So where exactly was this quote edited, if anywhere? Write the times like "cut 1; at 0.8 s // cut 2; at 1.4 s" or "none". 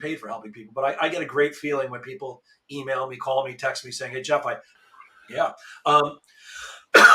cut 1; at 4.7 s